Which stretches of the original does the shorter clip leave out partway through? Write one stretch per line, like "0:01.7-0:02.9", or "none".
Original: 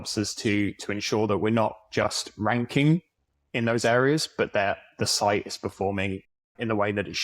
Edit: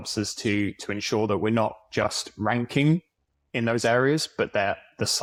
none